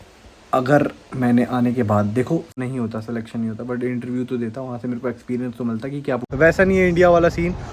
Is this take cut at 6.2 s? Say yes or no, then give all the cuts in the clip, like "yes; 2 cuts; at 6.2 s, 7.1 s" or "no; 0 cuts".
yes; 2 cuts; at 2.5 s, 6.2 s